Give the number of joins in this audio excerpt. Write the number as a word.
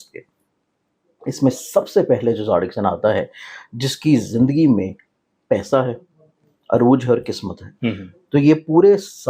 one